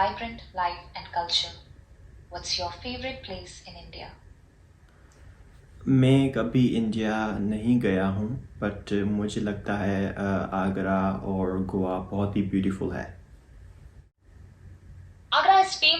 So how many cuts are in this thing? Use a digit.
1